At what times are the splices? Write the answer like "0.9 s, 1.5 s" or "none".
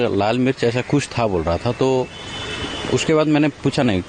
none